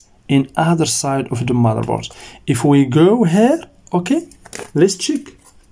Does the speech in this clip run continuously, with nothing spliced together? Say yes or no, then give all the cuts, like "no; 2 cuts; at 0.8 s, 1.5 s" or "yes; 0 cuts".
yes; 0 cuts